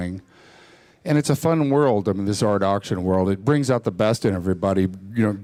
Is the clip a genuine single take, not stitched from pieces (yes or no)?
yes